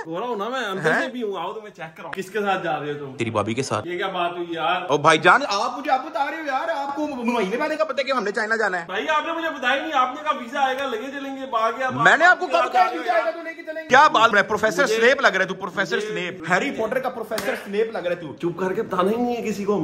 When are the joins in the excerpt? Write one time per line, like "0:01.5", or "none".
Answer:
0:02.1
0:13.9
0:18.3